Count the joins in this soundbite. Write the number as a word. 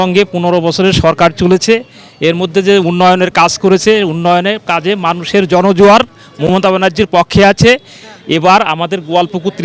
zero